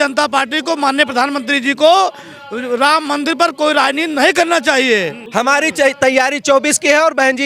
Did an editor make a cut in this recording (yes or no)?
yes